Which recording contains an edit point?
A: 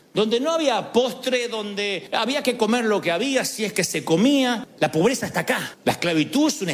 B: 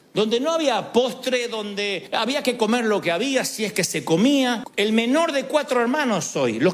A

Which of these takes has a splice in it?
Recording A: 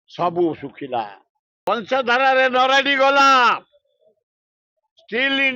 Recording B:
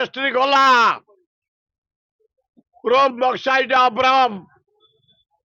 A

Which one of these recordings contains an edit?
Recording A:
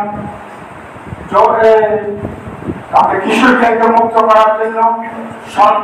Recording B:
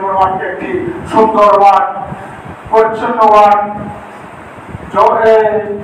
A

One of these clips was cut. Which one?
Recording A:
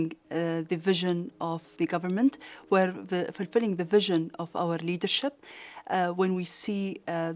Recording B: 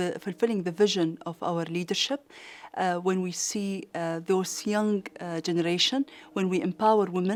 A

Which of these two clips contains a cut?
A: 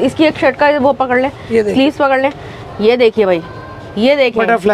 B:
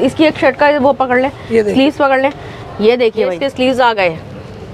B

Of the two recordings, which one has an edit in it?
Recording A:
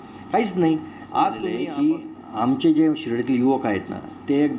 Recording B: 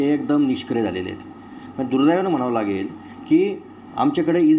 A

